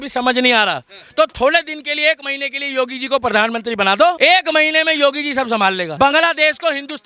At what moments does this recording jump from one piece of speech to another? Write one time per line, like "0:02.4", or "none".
0:04.2
0:05.9